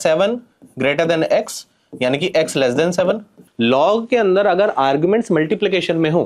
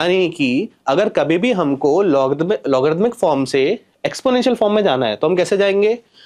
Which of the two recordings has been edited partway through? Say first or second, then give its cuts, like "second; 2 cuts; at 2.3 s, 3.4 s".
first; 1 cut; at 3.3 s